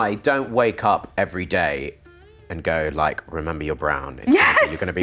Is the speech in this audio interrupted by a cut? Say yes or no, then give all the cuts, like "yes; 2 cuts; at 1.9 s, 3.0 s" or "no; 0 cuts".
no; 0 cuts